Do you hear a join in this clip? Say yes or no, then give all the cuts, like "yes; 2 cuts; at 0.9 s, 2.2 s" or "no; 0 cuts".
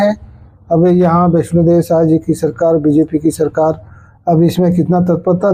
no; 0 cuts